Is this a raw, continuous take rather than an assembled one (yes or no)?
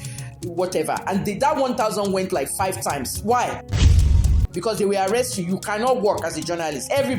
no